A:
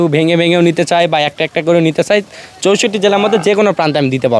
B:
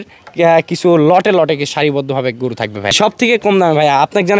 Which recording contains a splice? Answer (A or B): B